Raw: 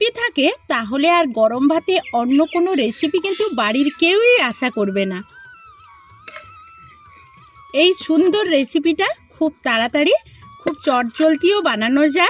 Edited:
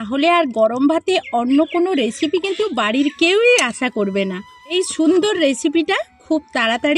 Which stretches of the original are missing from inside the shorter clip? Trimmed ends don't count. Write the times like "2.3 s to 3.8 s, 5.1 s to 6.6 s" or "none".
5.5 s to 7.8 s